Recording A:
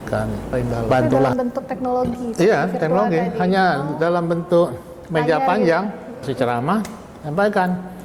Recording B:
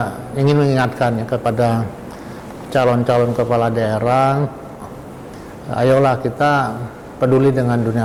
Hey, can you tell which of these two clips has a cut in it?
A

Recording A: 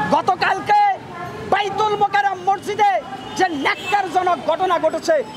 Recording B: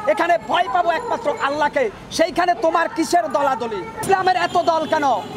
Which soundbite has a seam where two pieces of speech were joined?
B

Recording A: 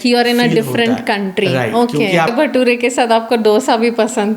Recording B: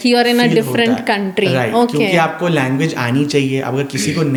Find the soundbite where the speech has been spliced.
A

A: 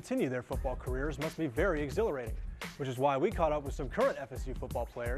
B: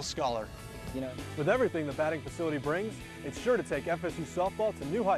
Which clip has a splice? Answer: B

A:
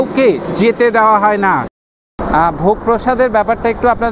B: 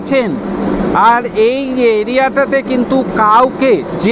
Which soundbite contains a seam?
A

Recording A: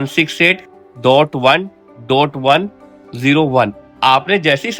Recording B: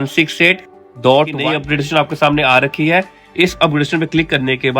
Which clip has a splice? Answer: B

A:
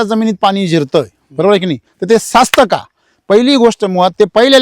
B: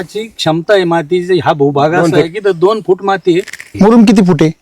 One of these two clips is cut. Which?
B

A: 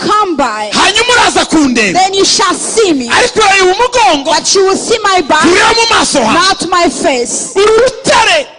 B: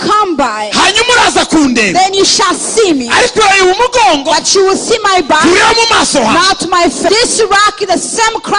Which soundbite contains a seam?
B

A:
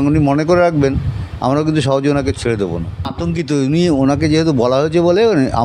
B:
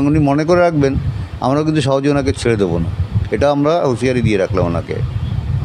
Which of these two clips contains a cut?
A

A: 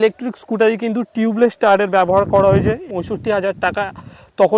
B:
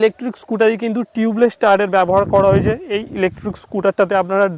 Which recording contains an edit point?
A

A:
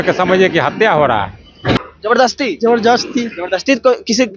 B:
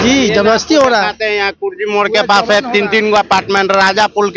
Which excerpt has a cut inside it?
A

